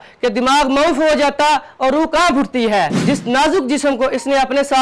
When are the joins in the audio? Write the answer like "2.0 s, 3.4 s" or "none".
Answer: 3.0 s